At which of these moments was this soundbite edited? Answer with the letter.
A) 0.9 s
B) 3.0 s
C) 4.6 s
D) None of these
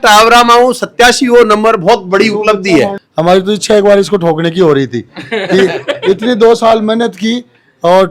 B